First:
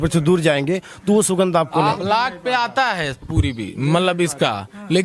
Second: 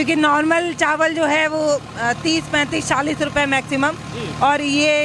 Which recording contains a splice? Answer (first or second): first